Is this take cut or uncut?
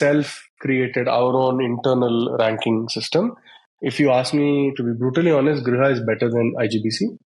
uncut